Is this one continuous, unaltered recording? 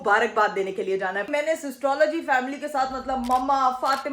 no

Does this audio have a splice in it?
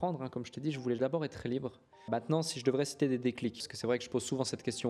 yes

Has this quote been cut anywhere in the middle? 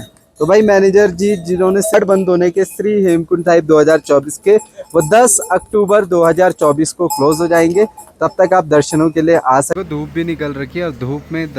yes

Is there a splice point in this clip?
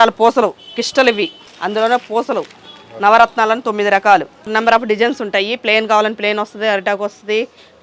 yes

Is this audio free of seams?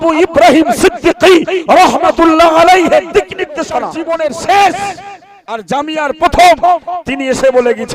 no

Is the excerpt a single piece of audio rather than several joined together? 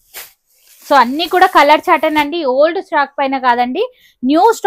yes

